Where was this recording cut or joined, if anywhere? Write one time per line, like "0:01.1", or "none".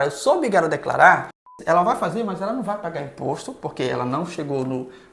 0:01.5